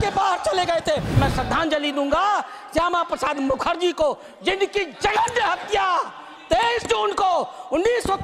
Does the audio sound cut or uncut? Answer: cut